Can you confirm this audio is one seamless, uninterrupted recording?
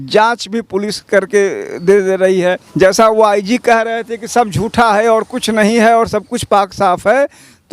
no; 1 cut; at 2.6 s

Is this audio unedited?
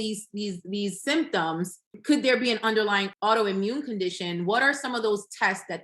no; 2 cuts; at 2.0 s, 3.1 s

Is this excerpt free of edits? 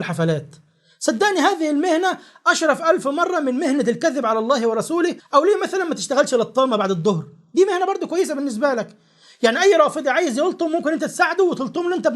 no; 1 cut; at 5.2 s

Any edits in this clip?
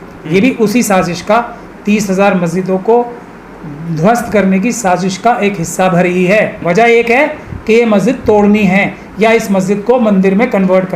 yes; 1 cut; at 6.6 s

